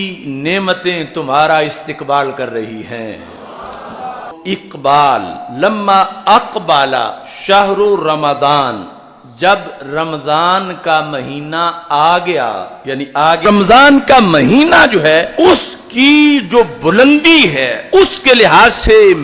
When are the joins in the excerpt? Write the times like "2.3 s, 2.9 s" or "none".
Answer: 4.4 s, 13.5 s